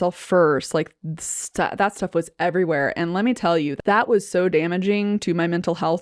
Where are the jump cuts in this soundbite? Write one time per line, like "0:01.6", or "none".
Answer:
0:03.7